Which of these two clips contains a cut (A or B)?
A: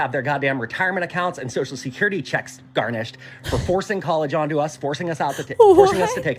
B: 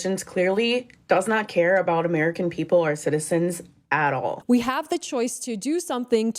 B